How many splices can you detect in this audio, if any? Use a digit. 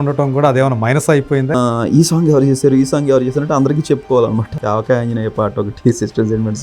2